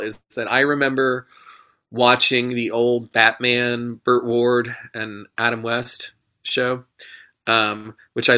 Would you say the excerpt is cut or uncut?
uncut